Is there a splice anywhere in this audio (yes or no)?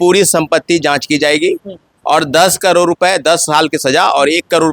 no